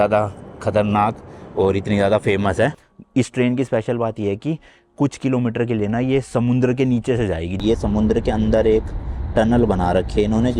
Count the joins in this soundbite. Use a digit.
2